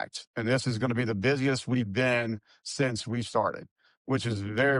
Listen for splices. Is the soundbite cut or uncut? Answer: uncut